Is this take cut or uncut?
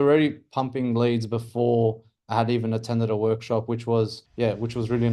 cut